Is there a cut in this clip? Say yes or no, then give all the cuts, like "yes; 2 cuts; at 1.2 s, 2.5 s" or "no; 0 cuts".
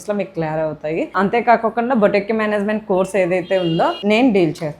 no; 0 cuts